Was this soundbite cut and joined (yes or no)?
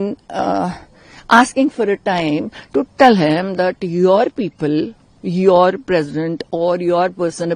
no